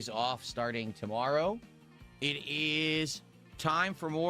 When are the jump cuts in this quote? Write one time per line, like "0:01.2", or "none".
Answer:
0:01.6